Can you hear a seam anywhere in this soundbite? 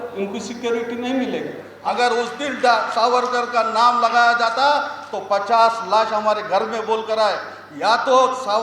yes; 1 cut; at 1.7 s

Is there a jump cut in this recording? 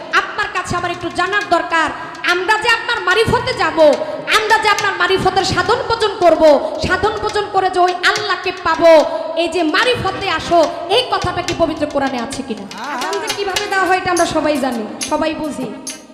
yes; 1 cut; at 13.1 s

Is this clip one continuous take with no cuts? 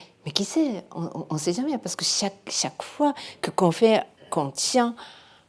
yes; 0 cuts

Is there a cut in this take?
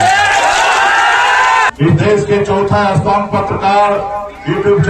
yes; 1 cut; at 1.7 s

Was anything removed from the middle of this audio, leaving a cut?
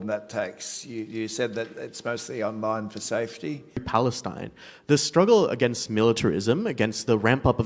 yes; 1 cut; at 3.8 s

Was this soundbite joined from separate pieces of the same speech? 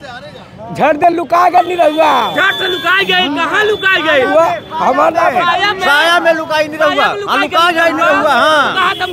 no; 0 cuts

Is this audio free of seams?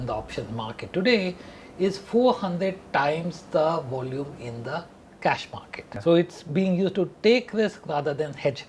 no; 1 cut; at 5.8 s

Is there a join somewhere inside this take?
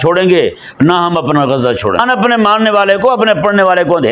yes; 1 cut; at 2.0 s

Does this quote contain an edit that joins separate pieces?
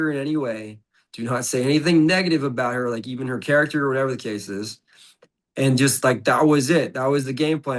no; 0 cuts

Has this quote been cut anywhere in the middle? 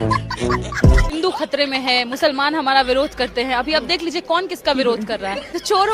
yes; 1 cut; at 1.1 s

